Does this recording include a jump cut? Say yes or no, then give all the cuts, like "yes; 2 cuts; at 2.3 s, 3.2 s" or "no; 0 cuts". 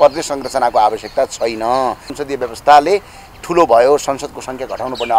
yes; 1 cut; at 2.1 s